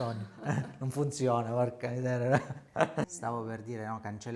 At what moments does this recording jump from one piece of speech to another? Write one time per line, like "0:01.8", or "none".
0:03.1